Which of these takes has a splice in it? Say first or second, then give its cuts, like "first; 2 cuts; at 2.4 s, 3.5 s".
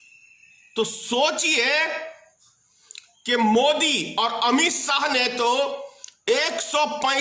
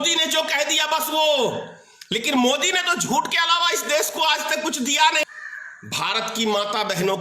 second; 1 cut; at 5.3 s